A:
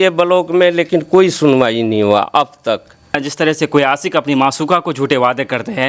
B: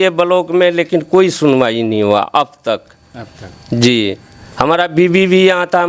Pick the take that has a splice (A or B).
A